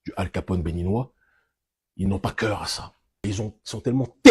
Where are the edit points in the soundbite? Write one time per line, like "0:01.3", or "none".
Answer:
0:03.3